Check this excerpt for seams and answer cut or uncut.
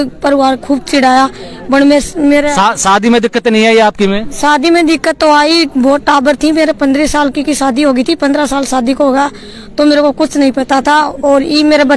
uncut